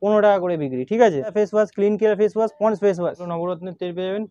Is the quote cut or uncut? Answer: cut